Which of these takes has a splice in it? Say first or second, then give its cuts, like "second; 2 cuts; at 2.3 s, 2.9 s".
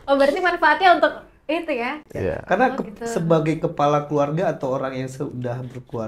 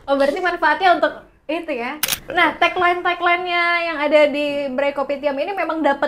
second; 1 cut; at 2.0 s